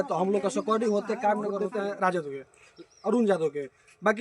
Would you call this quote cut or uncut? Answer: cut